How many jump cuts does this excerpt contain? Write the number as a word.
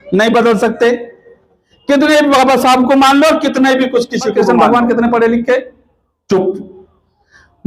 one